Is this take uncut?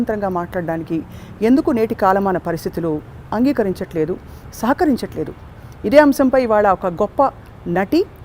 yes; 0 cuts

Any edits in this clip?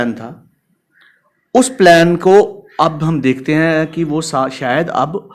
no; 0 cuts

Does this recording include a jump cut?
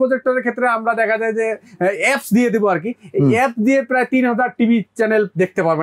no; 0 cuts

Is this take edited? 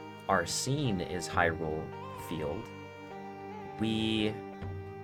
no; 0 cuts

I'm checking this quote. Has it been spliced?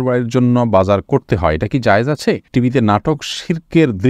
yes; 1 cut; at 2.5 s

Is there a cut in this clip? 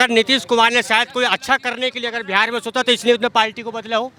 no; 0 cuts

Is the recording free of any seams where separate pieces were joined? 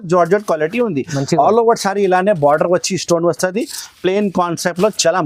yes; 0 cuts

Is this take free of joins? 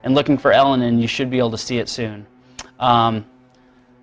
yes; 0 cuts

